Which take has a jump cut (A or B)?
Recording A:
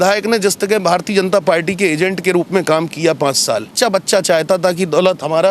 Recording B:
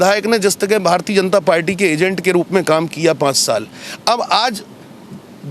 A